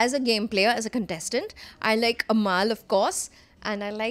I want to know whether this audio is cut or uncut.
uncut